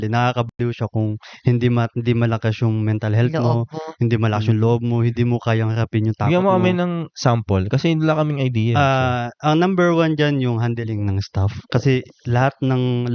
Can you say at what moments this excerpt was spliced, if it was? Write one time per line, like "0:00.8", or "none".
none